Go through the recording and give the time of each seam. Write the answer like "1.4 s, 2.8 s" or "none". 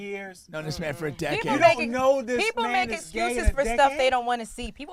none